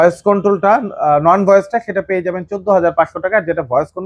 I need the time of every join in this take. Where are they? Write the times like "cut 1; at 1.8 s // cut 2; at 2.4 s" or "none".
none